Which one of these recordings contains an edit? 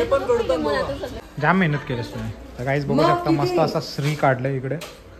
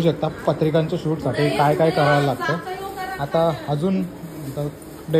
first; 1 cut; at 1.2 s

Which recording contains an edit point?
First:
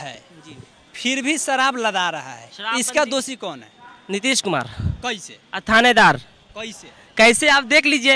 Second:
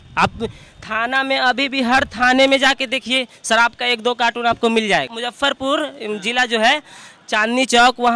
second; 1 cut; at 5.1 s

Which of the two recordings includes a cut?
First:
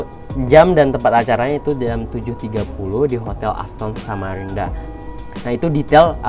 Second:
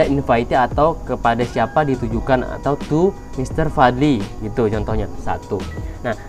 second; 1 cut; at 5.2 s

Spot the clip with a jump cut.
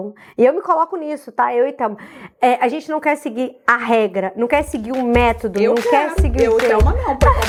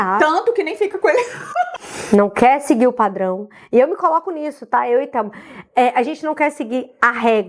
second; 1 cut; at 1.7 s

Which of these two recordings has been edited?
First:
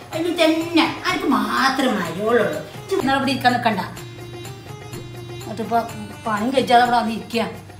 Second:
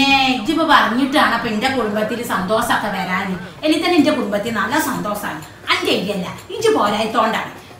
first; 1 cut; at 3.0 s

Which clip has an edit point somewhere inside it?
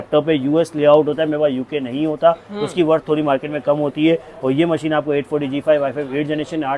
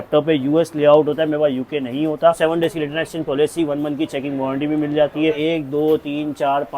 second; 2 cuts; at 2.4 s, 5.4 s

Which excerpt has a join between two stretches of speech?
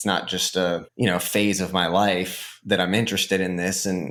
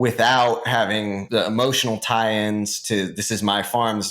second; 1 cut; at 1.2 s

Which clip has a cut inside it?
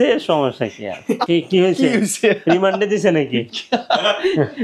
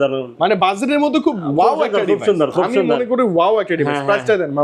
first; 1 cut; at 1.2 s

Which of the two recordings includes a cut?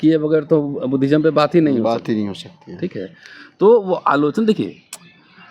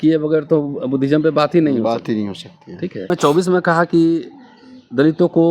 second; 1 cut; at 3.1 s

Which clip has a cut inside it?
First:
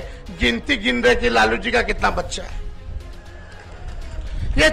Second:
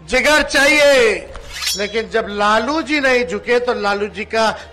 second; 1 cut; at 1.6 s

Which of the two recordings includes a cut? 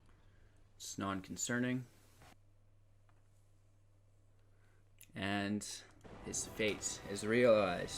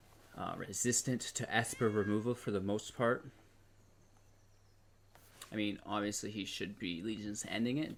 first; 1 cut; at 2.3 s

